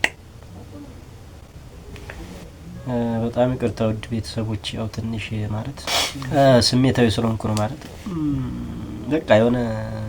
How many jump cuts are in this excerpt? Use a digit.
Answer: 1